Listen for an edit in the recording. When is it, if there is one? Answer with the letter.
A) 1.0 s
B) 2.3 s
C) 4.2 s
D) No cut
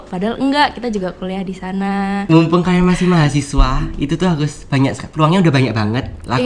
B